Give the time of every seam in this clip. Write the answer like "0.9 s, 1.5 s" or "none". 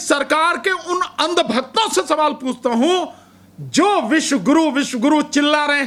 none